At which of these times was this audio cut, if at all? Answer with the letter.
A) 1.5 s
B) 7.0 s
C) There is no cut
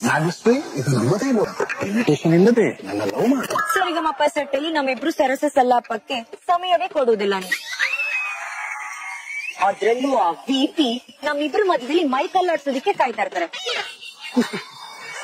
A